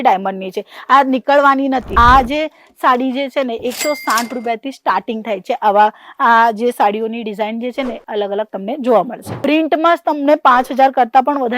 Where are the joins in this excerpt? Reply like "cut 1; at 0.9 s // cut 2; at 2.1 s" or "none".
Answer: cut 1; at 1.9 s // cut 2; at 9.2 s